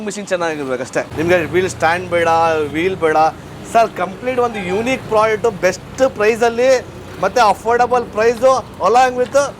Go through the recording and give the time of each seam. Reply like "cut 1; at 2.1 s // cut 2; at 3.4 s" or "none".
cut 1; at 1.1 s